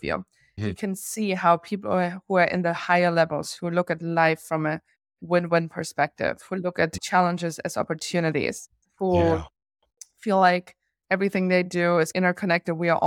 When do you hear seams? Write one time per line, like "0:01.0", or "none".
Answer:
none